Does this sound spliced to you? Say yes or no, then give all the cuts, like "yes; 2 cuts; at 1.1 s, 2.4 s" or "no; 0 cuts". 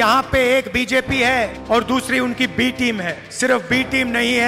yes; 2 cuts; at 1.6 s, 3.2 s